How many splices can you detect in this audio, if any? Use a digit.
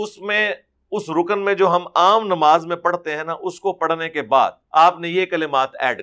1